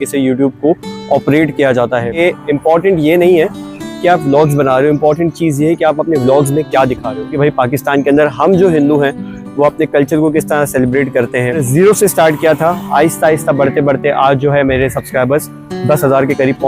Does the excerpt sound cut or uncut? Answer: cut